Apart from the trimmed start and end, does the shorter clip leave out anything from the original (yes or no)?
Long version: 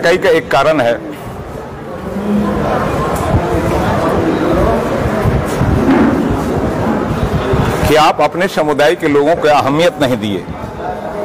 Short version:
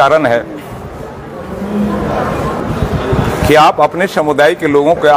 yes